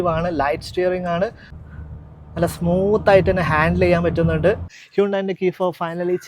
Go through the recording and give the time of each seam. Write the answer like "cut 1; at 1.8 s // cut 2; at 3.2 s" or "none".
cut 1; at 4.8 s

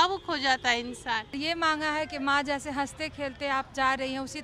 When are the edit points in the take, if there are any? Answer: cut 1; at 1.3 s

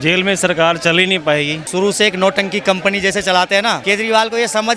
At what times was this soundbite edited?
cut 1; at 1.6 s // cut 2; at 3.8 s

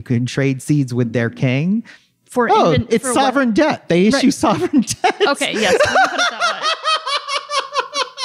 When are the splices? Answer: none

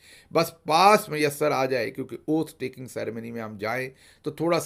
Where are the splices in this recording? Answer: none

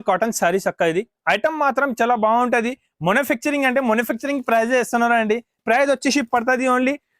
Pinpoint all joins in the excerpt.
cut 1; at 5.6 s

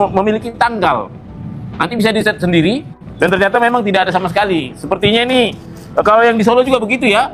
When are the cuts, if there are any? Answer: none

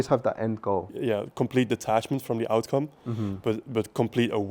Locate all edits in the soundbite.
cut 1; at 0.9 s

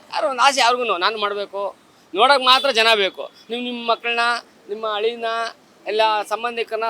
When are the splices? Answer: none

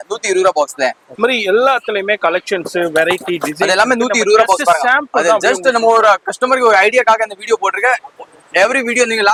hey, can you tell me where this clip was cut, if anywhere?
none

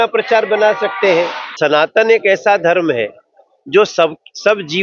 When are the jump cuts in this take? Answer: cut 1; at 1.5 s

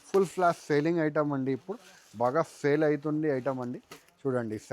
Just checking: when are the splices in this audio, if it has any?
none

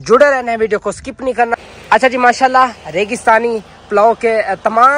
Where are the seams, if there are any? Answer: cut 1; at 1.6 s

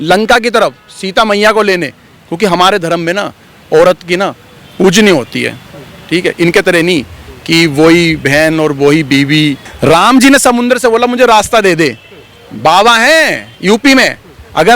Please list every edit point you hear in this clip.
none

